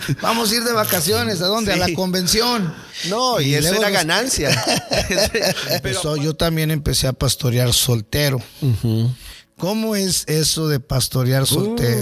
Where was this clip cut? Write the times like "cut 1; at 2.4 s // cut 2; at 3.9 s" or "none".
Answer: cut 1; at 5.9 s